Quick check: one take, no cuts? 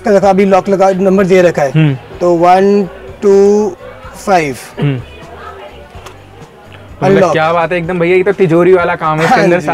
yes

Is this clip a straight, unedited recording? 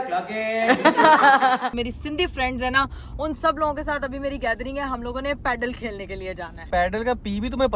no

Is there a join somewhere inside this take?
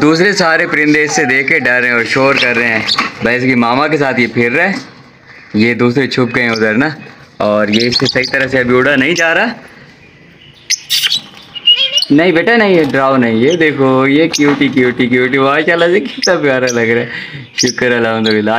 no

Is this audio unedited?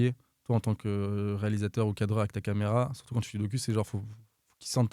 yes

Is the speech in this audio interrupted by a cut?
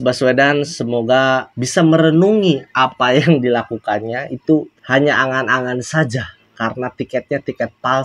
no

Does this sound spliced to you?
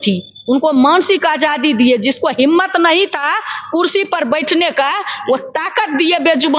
no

